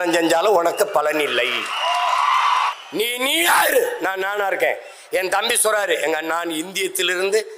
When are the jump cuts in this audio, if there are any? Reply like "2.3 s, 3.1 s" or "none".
2.7 s